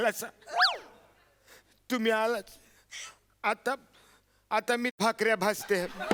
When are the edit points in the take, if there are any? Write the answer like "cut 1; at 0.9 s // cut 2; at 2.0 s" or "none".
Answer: none